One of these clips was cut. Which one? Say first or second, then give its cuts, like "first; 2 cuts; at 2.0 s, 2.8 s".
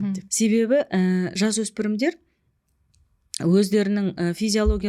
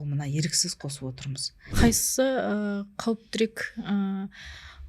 second; 1 cut; at 1.7 s